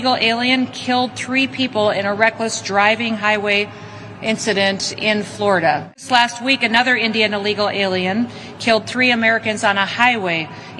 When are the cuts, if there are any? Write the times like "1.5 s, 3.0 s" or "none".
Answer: none